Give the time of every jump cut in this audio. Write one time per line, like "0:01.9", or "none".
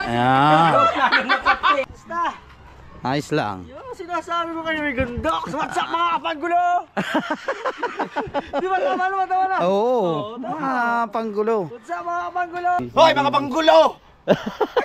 0:01.8
0:12.8